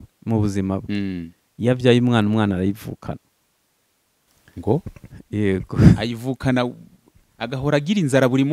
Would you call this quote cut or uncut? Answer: uncut